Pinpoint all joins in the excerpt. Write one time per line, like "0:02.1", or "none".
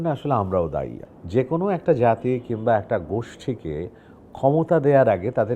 0:01.0